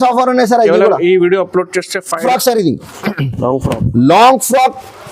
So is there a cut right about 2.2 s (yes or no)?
yes